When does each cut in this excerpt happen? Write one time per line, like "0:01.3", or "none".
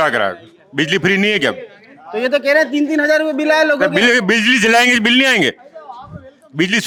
none